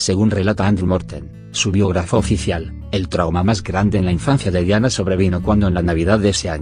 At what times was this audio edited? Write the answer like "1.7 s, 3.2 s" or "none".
3.8 s